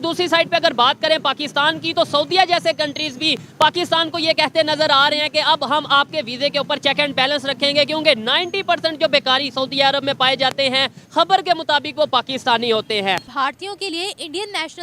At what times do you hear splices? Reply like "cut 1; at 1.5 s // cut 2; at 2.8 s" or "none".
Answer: cut 1; at 13.3 s